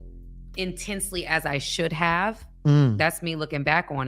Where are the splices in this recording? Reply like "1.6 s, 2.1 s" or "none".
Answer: 2.5 s

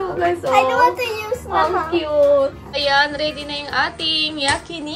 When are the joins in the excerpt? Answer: 2.8 s

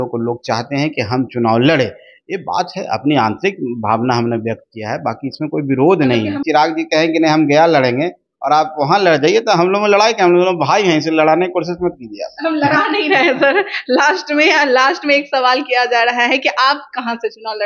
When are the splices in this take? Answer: 6.4 s

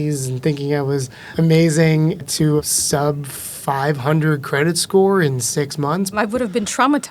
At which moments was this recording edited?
1.2 s, 2.6 s, 6.1 s

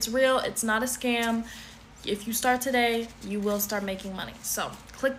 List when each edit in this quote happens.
none

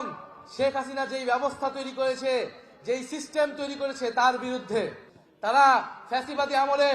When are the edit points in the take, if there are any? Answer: 5.0 s

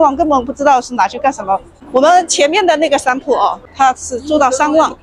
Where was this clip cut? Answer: 1.7 s

